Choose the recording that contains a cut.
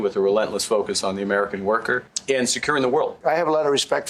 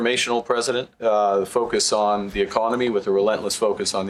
first; 2 cuts; at 2.1 s, 3.2 s

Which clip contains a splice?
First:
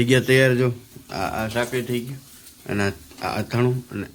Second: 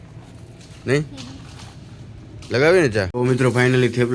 second; 1 cut; at 3.1 s

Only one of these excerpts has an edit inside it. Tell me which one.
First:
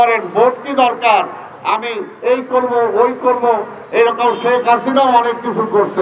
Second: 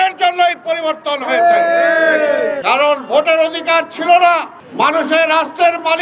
second; 2 cuts; at 2.6 s, 4.6 s

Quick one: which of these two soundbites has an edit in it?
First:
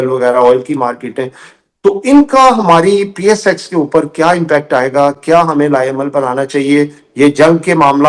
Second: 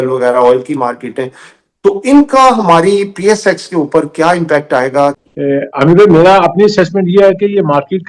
second; 1 cut; at 5.2 s

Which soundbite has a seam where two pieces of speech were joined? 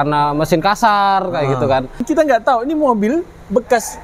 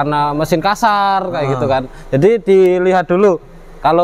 first; 1 cut; at 2.0 s

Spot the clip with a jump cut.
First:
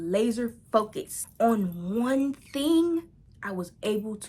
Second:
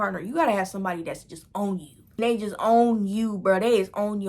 second; 1 cut; at 2.0 s

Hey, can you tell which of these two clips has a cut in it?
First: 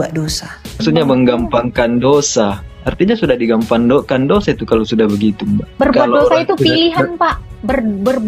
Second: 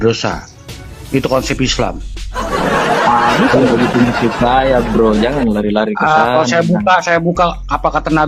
first; 2 cuts; at 0.8 s, 5.7 s

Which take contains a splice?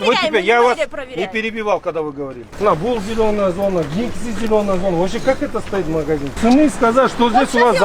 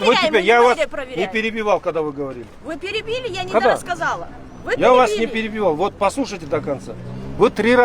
first; 2 cuts; at 2.4 s, 6.4 s

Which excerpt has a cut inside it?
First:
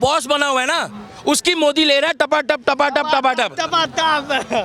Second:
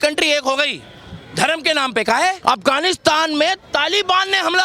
second; 1 cut; at 2.4 s

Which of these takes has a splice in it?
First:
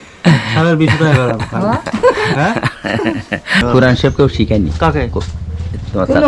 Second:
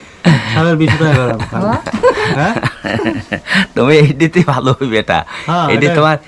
first; 1 cut; at 3.7 s

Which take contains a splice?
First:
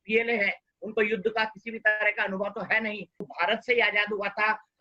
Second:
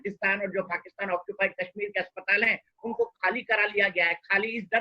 first; 1 cut; at 3.3 s

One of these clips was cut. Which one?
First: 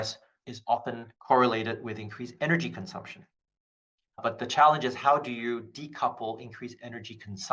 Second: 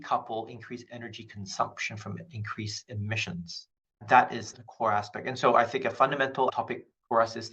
second; 2 cuts; at 4.0 s, 6.5 s

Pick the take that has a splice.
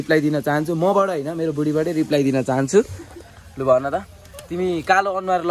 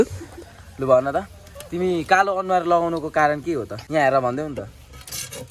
second; 1 cut; at 3.8 s

